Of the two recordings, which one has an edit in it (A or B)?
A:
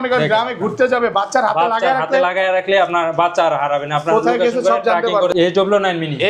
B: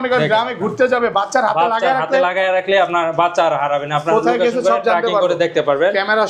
A